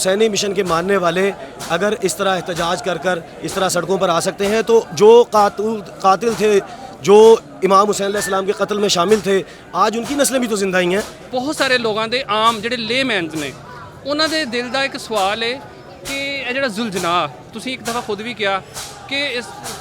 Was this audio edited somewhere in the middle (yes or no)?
yes